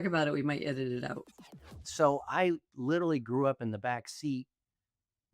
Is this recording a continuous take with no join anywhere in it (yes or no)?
no